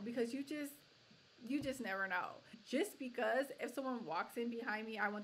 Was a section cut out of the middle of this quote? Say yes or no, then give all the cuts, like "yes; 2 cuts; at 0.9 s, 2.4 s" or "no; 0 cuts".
yes; 1 cut; at 2.5 s